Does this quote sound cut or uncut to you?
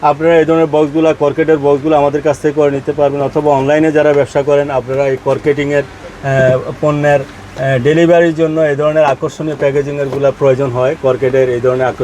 uncut